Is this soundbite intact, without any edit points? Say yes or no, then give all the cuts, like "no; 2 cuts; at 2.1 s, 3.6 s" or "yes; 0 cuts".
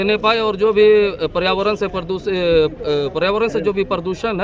yes; 0 cuts